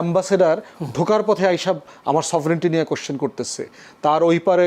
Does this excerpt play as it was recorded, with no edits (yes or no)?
yes